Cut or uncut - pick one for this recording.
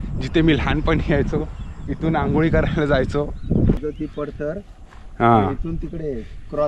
cut